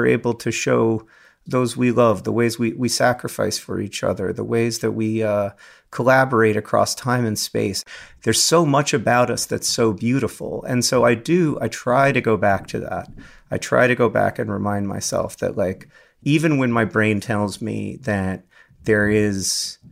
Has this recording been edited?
yes; 2 cuts; at 1.4 s, 7.8 s

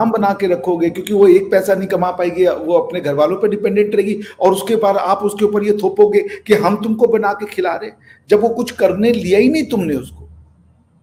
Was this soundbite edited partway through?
no; 0 cuts

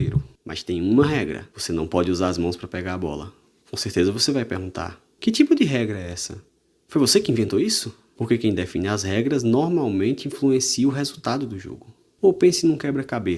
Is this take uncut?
yes; 0 cuts

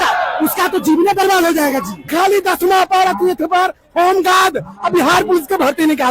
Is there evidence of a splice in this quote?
yes; 1 cut; at 2.0 s

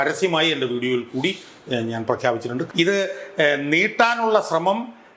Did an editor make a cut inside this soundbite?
yes; 1 cut; at 2.7 s

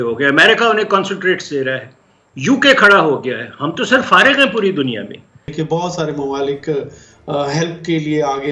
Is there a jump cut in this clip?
yes; 1 cut; at 5.5 s

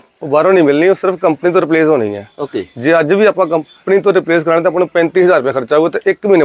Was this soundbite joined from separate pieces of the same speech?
no; 0 cuts

